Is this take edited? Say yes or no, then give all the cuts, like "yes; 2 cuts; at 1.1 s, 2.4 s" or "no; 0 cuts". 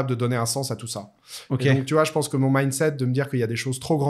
no; 0 cuts